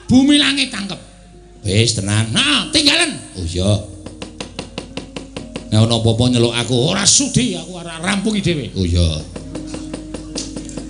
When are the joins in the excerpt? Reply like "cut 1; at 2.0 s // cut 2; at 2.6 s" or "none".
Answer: none